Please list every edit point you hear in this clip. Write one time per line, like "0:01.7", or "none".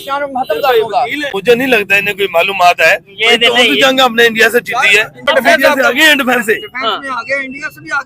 0:01.3
0:05.3